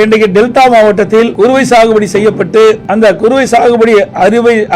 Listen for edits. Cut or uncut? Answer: cut